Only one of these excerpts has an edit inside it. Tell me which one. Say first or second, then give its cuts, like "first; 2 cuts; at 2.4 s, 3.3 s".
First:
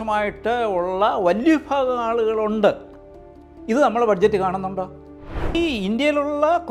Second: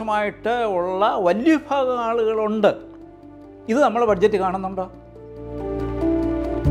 first; 1 cut; at 5.5 s